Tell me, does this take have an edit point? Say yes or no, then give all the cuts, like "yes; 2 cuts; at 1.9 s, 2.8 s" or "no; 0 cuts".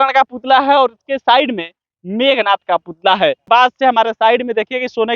yes; 1 cut; at 3.4 s